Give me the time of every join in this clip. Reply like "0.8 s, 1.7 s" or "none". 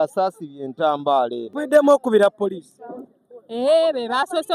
1.5 s